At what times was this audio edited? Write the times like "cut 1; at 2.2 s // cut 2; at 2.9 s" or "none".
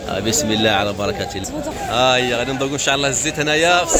cut 1; at 1.4 s